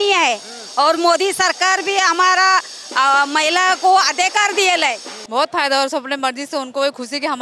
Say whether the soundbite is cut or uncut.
cut